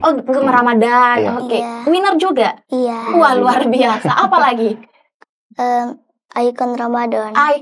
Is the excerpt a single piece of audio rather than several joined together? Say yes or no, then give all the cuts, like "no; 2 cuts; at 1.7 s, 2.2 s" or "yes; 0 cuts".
yes; 0 cuts